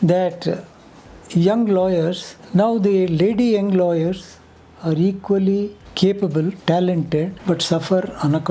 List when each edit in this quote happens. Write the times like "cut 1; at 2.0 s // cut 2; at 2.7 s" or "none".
cut 1; at 2.3 s // cut 2; at 5.8 s // cut 3; at 6.6 s // cut 4; at 7.4 s